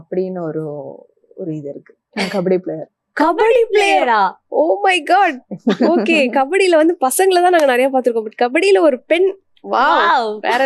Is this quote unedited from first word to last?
no; 1 cut; at 2.0 s

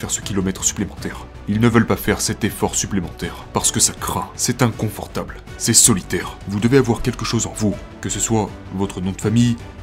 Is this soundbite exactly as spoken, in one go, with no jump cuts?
no; 1 cut; at 6.4 s

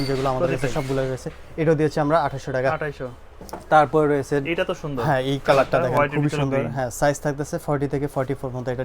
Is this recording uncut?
yes; 0 cuts

